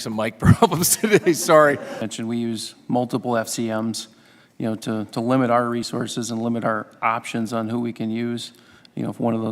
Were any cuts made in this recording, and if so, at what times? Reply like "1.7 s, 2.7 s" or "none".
2.1 s